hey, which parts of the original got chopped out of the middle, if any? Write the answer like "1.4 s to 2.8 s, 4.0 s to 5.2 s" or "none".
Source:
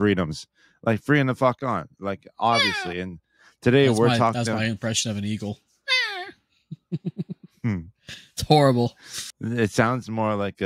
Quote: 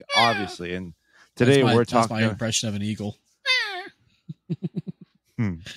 4.4 s to 4.5 s